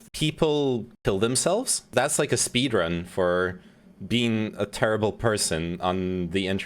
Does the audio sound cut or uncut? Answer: cut